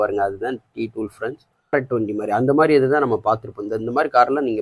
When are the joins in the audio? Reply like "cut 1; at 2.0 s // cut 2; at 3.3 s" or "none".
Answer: cut 1; at 1.7 s